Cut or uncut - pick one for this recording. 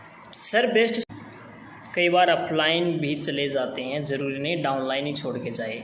cut